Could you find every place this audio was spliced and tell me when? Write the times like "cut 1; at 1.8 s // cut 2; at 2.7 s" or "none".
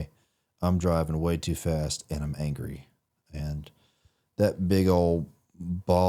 none